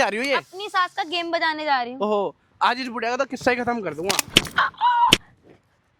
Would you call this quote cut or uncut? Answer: uncut